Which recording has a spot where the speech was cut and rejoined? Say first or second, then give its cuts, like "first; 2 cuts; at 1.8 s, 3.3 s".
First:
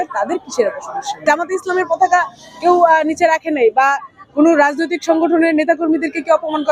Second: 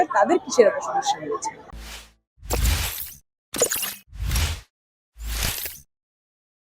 first; 1 cut; at 1.2 s